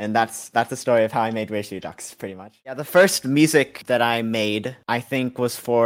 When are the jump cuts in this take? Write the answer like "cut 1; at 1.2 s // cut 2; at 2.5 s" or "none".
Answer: cut 1; at 2.7 s